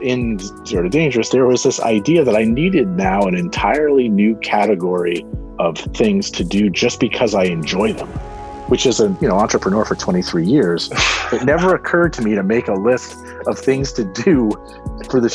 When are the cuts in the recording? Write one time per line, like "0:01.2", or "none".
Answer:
none